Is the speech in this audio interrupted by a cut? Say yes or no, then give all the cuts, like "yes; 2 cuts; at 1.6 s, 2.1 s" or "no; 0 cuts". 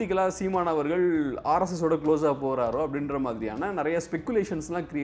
no; 0 cuts